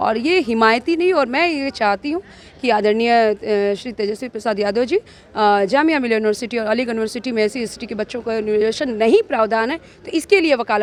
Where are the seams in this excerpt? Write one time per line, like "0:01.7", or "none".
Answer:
none